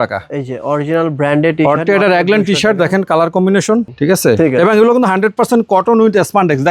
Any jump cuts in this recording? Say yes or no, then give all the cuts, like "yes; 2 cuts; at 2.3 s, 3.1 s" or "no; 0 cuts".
yes; 1 cut; at 3.9 s